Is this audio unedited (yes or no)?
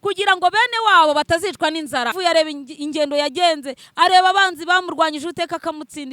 no